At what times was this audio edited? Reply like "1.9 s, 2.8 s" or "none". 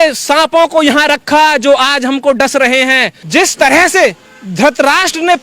3.1 s